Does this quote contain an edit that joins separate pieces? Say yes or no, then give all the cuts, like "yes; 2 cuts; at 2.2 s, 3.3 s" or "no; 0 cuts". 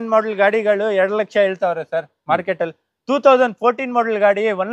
no; 0 cuts